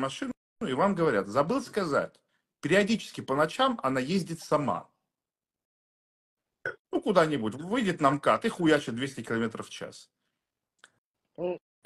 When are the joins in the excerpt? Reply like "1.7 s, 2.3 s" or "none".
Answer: none